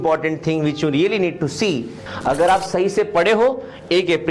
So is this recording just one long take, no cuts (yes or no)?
no